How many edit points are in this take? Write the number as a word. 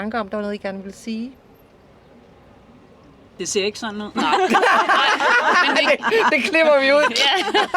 one